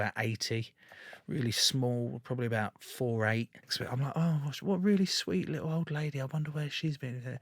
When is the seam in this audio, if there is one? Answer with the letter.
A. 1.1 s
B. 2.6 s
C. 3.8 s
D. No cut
C